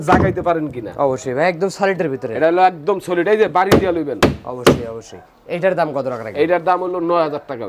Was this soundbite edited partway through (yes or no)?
no